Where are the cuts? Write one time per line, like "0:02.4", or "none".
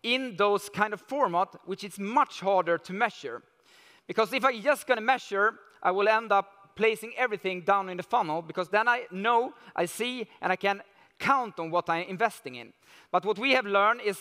none

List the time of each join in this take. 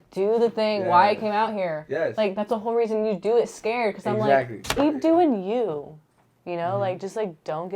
0:04.8

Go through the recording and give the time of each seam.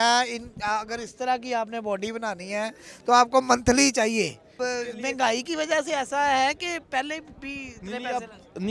0:04.6

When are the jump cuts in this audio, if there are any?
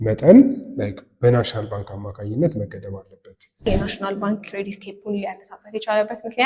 0:03.7

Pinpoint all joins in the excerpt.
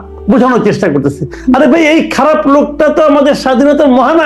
none

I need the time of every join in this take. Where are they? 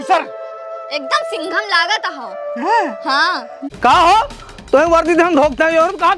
0:03.6

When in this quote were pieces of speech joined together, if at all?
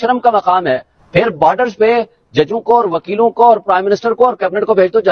0:00.9

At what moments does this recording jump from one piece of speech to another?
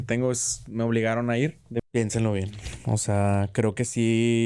0:01.8

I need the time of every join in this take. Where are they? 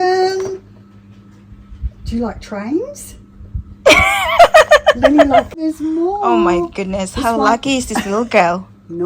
0:05.6

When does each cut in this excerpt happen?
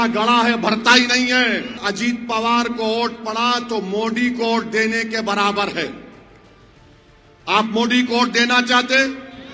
0:01.8

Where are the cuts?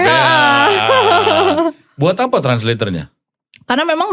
none

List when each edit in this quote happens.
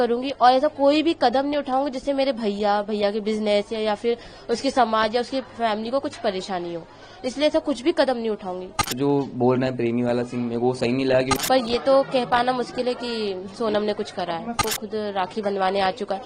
0:08.9
0:11.3
0:14.6

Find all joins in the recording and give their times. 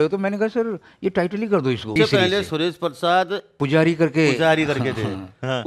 0:01.9
0:03.5

